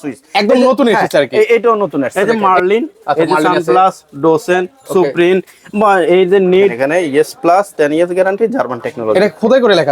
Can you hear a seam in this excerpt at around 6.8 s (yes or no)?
yes